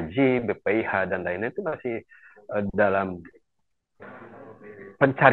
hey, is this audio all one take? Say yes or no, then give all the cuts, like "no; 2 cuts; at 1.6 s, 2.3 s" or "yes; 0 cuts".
yes; 0 cuts